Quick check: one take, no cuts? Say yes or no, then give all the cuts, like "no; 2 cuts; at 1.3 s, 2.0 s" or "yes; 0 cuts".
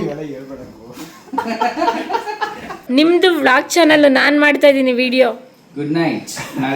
no; 1 cut; at 2.8 s